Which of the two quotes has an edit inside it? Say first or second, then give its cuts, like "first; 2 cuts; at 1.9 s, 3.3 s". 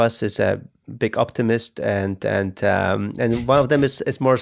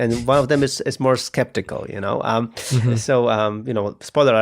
second; 1 cut; at 2.9 s